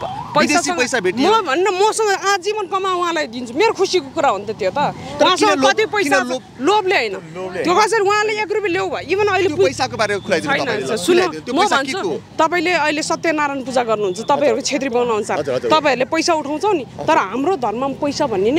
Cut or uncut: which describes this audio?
uncut